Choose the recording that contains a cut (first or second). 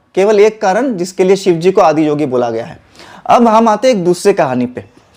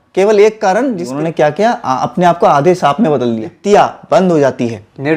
second